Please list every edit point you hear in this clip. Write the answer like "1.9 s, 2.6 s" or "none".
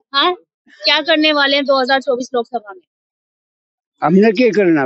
none